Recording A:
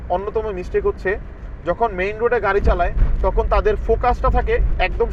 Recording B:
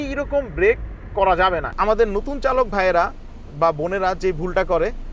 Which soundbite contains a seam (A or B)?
B